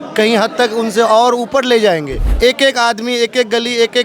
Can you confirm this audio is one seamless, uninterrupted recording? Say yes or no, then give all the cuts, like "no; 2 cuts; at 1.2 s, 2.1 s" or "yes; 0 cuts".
no; 1 cut; at 2.2 s